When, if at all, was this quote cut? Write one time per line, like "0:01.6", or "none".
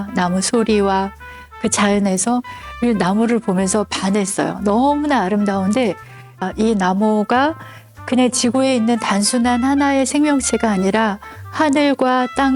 0:06.4